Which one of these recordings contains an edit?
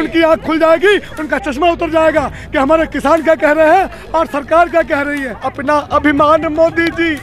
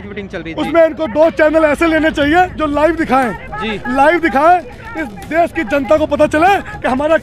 first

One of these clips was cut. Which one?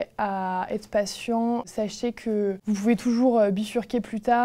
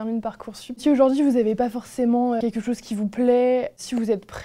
second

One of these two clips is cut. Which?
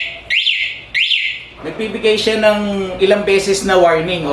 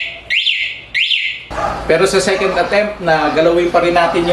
second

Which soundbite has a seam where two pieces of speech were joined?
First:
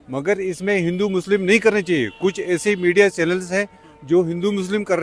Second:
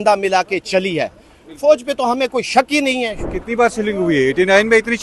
second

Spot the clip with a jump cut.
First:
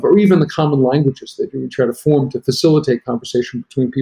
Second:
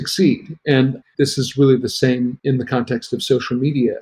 second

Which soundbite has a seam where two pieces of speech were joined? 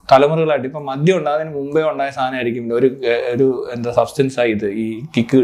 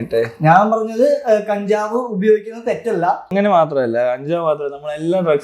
second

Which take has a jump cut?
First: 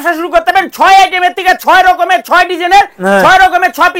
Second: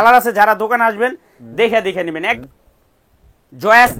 second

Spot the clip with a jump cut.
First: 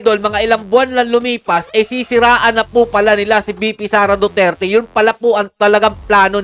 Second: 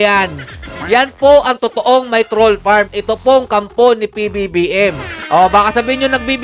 second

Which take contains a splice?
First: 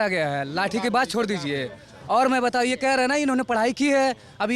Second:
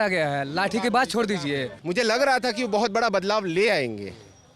second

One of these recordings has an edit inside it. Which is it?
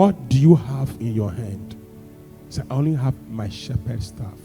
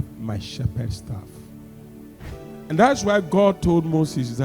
second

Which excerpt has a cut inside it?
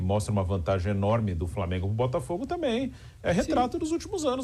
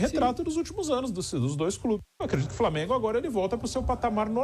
second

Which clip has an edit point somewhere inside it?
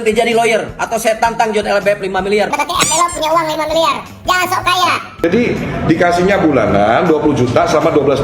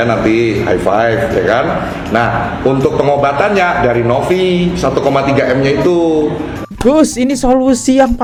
first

